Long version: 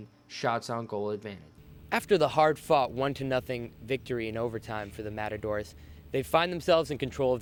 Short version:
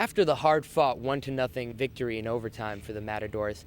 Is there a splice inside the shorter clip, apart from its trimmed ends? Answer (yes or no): yes